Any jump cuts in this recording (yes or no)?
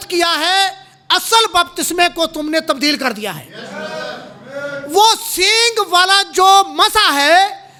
no